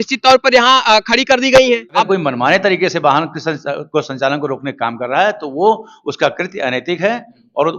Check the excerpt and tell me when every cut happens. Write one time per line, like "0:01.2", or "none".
0:01.9